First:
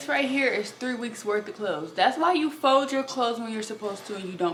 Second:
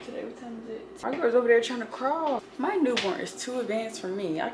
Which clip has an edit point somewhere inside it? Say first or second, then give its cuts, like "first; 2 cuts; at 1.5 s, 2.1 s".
second; 2 cuts; at 0.9 s, 2.4 s